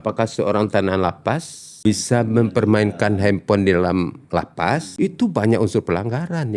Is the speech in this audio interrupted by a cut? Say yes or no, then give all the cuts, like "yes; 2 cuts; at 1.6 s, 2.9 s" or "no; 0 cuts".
yes; 2 cuts; at 1.7 s, 4.9 s